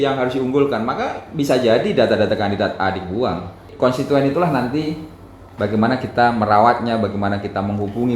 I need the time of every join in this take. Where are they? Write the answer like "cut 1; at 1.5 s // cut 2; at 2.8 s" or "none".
cut 1; at 3.7 s